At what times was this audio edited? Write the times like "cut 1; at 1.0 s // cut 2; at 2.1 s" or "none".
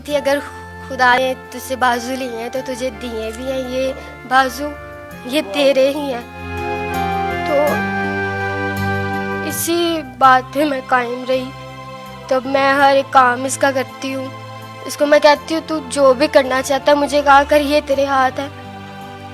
cut 1; at 1.1 s